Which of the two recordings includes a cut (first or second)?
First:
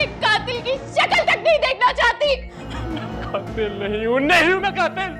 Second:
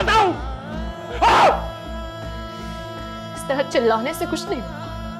first